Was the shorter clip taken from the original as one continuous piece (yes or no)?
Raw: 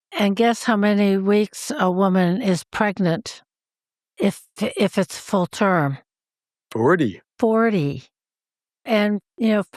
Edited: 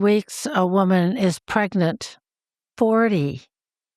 no